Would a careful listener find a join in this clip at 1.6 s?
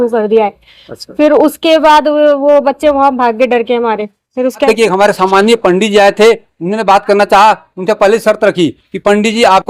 no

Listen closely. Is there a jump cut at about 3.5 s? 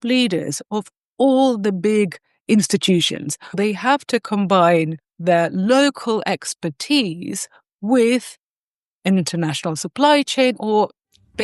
yes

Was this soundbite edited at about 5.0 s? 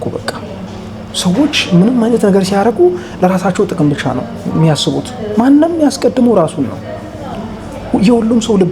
no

